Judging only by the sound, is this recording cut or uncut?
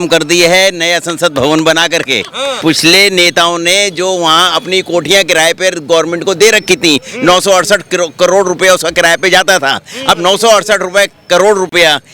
cut